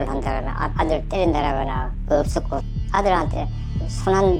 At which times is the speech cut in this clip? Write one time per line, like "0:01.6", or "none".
none

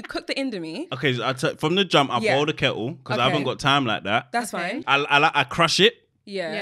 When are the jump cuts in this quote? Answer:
0:04.8

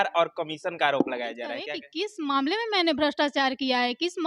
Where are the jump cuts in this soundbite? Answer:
0:01.8

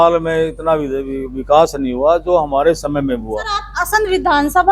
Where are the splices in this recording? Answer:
0:03.7

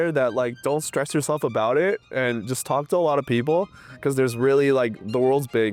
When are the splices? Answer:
none

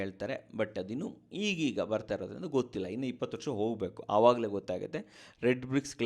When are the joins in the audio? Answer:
none

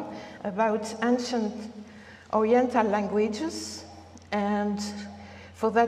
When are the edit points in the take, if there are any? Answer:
0:01.4

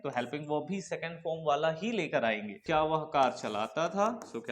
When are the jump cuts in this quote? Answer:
0:02.6

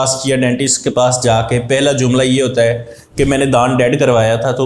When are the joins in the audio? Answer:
none

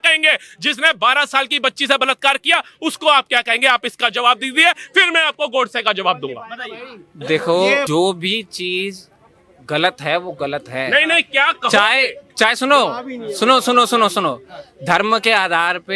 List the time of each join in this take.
none

